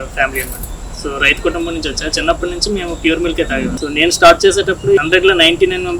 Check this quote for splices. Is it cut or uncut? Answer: cut